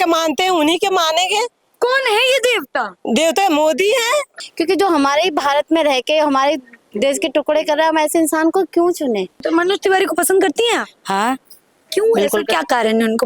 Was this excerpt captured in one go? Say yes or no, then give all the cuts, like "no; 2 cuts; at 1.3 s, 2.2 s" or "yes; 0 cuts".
no; 2 cuts; at 4.3 s, 9.4 s